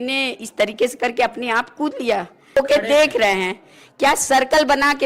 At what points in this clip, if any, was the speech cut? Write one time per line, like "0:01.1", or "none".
0:02.6

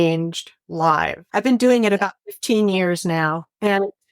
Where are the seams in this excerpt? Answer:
0:01.2

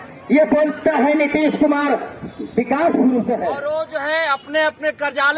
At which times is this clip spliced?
0:03.6

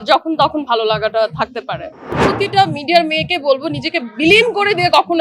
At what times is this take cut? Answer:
0:02.1

